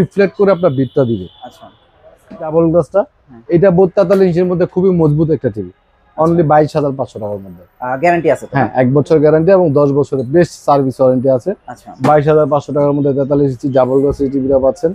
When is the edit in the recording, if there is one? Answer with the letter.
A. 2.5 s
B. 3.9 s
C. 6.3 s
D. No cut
A